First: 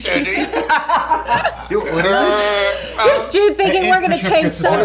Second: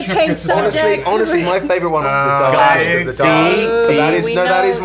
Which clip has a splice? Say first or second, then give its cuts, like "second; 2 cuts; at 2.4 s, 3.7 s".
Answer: second; 1 cut; at 2.1 s